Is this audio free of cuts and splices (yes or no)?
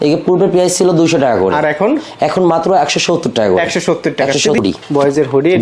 no